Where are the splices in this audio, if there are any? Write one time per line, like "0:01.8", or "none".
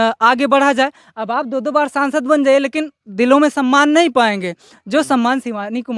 none